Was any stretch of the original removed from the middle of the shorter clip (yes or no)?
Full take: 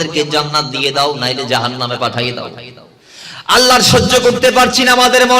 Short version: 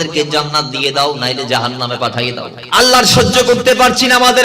yes